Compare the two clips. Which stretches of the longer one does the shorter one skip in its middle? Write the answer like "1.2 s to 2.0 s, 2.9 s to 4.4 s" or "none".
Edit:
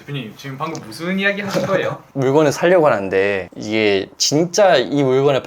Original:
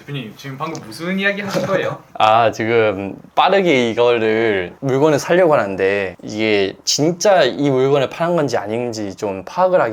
2.0 s to 4.7 s